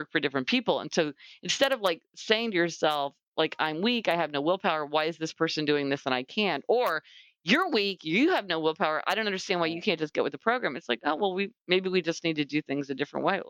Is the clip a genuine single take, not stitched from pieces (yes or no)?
yes